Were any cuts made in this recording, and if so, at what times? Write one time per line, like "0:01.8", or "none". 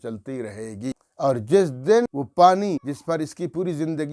0:01.1
0:02.1
0:02.8